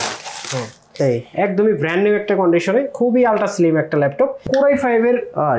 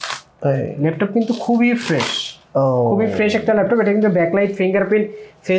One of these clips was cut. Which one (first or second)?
first